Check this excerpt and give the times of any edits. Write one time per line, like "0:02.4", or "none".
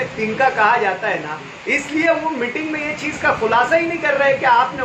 none